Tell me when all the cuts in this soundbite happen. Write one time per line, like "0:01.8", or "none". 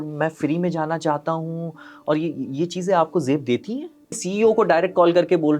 0:04.2